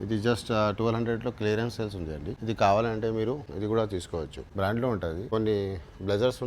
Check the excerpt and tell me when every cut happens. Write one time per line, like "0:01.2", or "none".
0:02.3
0:03.5
0:04.4
0:05.2